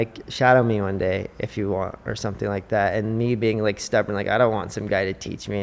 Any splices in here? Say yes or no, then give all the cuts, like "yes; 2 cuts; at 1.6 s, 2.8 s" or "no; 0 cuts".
no; 0 cuts